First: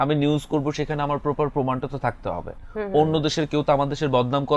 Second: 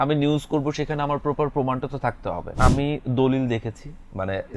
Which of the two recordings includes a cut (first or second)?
second